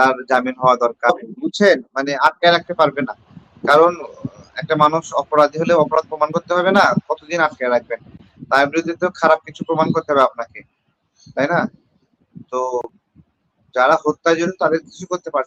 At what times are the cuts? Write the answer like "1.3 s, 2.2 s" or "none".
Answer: 1.1 s